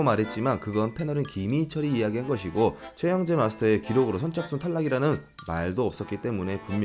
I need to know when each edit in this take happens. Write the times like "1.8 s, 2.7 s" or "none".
none